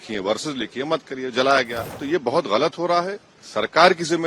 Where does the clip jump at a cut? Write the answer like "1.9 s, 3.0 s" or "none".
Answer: 1.8 s